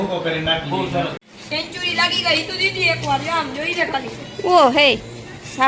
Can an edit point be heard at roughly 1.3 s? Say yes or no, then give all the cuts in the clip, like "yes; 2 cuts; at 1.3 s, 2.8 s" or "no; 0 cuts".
yes; 1 cut; at 1.3 s